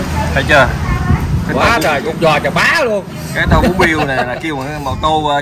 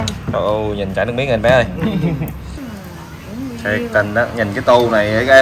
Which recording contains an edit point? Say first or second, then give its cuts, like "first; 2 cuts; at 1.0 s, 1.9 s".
second; 1 cut; at 2.5 s